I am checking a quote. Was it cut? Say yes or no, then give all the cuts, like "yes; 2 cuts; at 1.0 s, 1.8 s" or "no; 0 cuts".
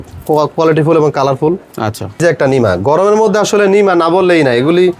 yes; 1 cut; at 2.2 s